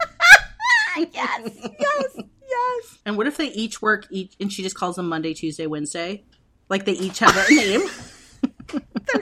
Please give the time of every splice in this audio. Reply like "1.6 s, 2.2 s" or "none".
2.9 s